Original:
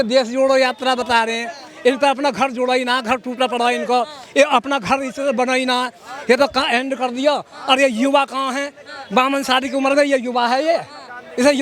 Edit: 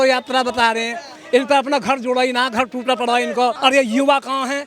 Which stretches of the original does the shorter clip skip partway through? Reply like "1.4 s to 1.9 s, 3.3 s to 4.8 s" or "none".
4.1 s to 7.6 s